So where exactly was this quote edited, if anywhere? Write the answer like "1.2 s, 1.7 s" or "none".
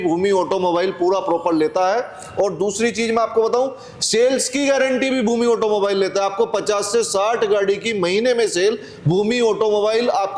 none